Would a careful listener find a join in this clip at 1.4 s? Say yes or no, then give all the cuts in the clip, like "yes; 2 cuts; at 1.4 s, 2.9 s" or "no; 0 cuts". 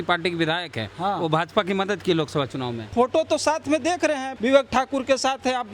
no; 2 cuts; at 2.9 s, 4.3 s